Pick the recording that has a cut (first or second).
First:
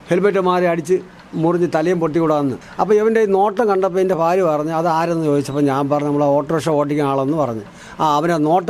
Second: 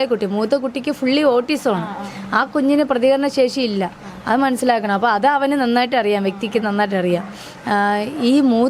first